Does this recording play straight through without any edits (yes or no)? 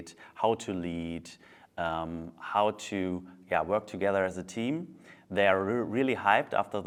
yes